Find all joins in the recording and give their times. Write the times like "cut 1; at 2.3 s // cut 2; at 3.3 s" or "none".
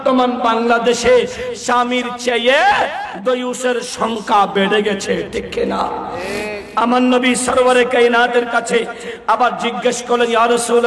cut 1; at 6.6 s

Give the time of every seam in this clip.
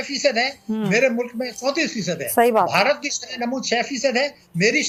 none

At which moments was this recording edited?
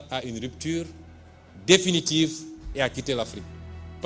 none

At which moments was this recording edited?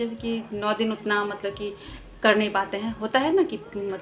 none

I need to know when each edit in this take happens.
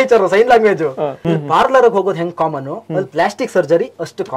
cut 1; at 1.2 s

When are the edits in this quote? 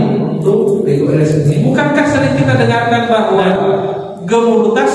cut 1; at 1.7 s

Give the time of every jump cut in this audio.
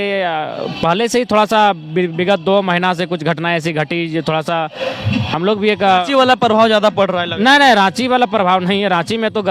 none

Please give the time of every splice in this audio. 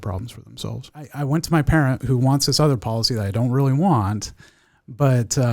cut 1; at 1.2 s

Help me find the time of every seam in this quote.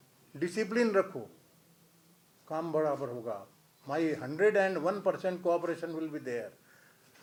none

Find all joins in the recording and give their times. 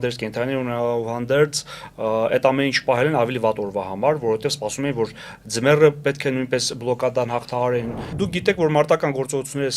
cut 1; at 8.1 s

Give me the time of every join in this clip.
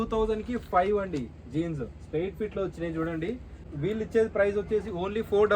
cut 1; at 3.7 s

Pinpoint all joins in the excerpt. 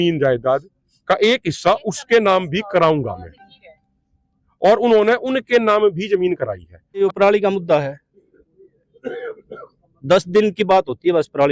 cut 1; at 7.0 s

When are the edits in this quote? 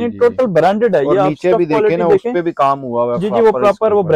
none

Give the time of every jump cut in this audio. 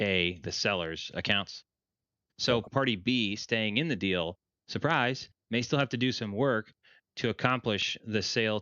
cut 1; at 2.4 s

